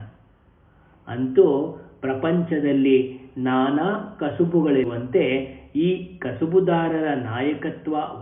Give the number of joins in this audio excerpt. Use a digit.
1